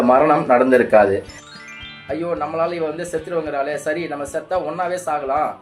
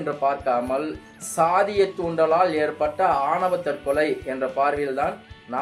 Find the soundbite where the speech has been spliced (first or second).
first